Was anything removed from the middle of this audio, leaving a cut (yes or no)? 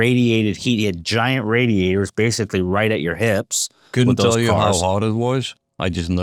no